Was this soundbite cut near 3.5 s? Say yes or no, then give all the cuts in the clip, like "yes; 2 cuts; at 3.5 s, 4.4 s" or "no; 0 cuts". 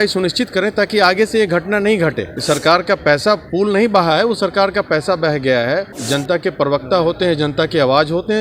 no; 2 cuts; at 2.3 s, 6.0 s